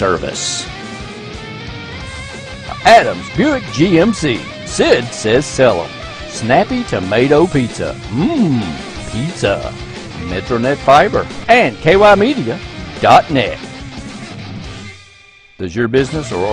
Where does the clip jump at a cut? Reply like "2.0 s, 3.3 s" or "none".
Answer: 11.3 s